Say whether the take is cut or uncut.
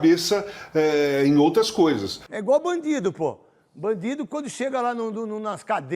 cut